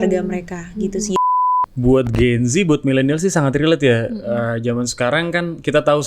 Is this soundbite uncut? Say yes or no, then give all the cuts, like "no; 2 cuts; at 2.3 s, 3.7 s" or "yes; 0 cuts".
no; 1 cut; at 1.2 s